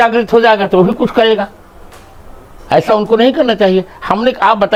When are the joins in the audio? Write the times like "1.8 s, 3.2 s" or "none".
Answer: none